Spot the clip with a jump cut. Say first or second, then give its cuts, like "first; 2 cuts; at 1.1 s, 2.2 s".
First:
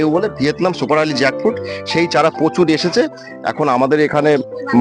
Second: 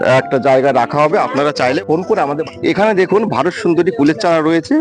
second; 1 cut; at 2.4 s